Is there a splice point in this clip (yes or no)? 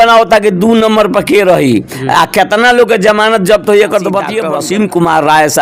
yes